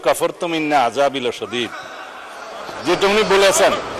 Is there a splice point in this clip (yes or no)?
no